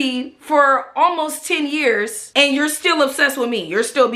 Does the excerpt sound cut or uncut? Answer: uncut